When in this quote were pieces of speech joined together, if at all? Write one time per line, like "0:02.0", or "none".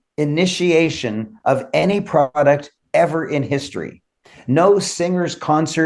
none